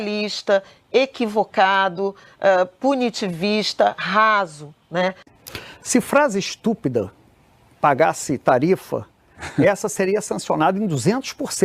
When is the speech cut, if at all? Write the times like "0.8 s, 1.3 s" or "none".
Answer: 5.2 s